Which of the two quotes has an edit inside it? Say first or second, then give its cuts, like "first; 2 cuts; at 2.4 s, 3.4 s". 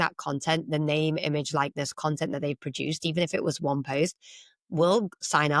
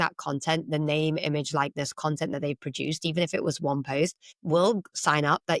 second; 1 cut; at 4.3 s